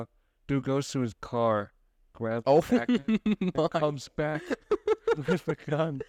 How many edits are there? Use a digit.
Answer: 0